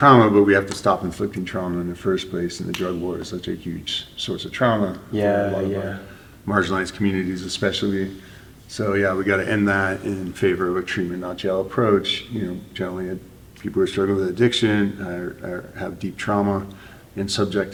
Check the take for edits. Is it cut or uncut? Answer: uncut